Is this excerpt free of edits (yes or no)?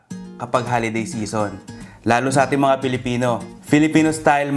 no